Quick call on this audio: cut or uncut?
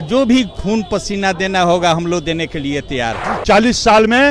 cut